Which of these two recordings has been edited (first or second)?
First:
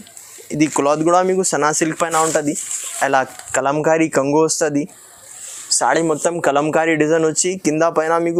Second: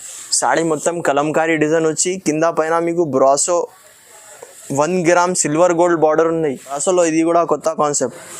second